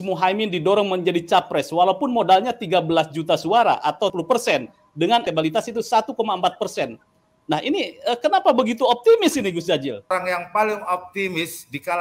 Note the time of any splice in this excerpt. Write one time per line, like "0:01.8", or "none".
0:04.1
0:05.2
0:10.1